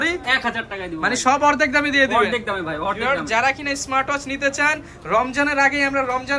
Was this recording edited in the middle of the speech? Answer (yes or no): no